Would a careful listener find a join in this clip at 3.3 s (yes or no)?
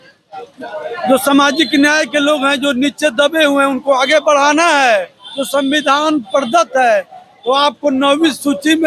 no